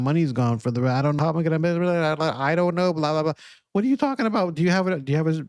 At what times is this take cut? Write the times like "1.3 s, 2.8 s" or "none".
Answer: 1.2 s